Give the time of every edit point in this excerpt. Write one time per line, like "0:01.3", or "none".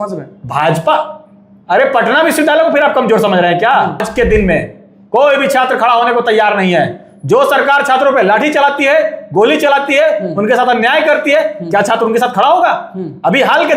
0:04.1